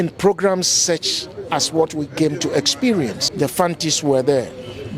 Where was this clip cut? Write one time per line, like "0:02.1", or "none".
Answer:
0:03.2

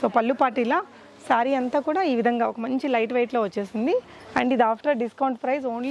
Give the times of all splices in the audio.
none

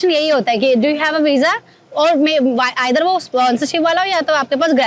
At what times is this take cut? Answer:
none

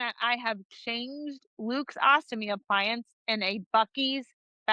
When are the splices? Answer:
none

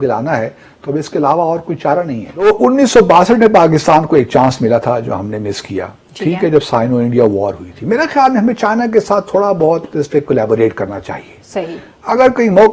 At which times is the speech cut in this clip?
0:02.4

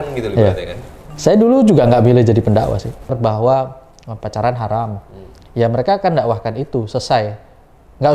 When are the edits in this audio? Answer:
0:03.2

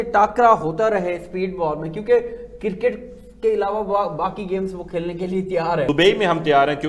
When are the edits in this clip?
0:05.9

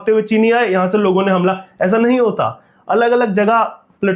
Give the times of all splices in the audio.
none

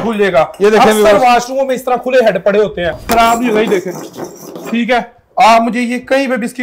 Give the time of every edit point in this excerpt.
0:03.0

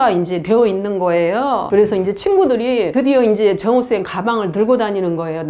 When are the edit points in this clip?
none

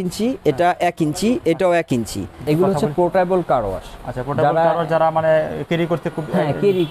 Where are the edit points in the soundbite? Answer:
0:02.4

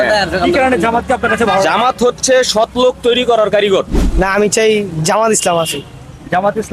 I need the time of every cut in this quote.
0:04.1

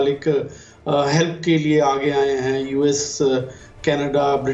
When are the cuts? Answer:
none

